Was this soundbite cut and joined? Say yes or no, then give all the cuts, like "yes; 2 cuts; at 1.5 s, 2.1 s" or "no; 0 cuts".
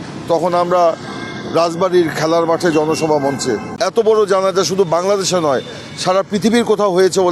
yes; 1 cut; at 3.7 s